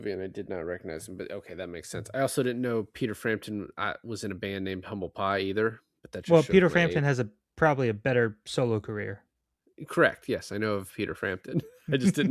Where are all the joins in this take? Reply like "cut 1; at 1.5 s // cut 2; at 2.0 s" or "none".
none